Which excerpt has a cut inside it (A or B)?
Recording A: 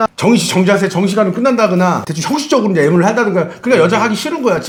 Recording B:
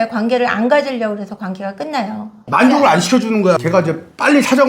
B